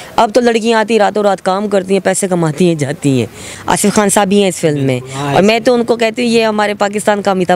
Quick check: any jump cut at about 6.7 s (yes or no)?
no